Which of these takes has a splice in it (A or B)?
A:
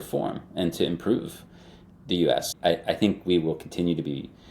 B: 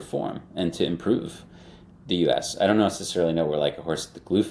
A